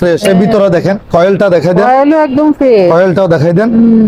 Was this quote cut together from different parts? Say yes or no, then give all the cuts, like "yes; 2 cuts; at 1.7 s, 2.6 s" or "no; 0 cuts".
no; 0 cuts